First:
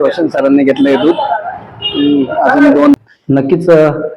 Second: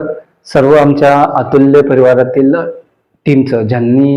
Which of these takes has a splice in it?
first; 1 cut; at 3.0 s

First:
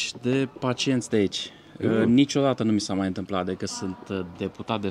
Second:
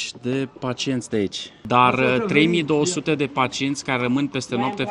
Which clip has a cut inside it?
second; 1 cut; at 1.5 s

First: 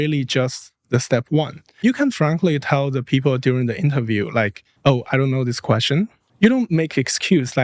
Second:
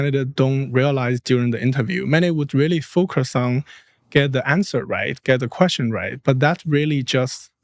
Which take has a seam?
first; 3 cuts; at 1.8 s, 4.6 s, 6.2 s

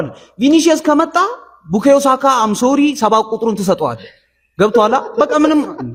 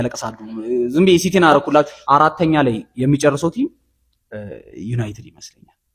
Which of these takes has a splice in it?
second; 1 cut; at 2.0 s

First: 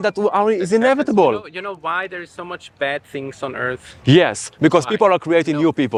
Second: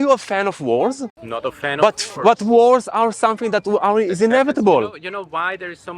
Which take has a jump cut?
second; 1 cut; at 1.2 s

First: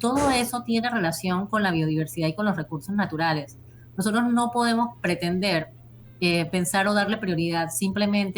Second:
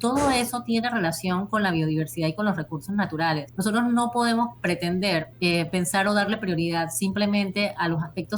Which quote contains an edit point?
second; 2 cuts; at 3.5 s, 5.3 s

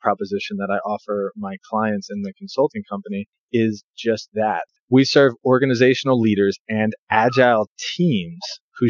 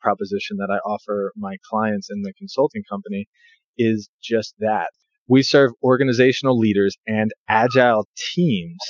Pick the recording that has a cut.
first; 2 cuts; at 3.3 s, 4.7 s

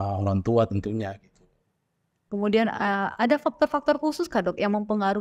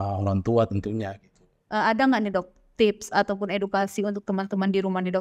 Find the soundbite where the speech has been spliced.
second; 1 cut; at 1.6 s

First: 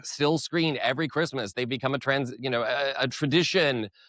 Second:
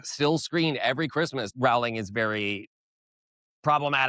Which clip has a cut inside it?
second; 1 cut; at 1.5 s

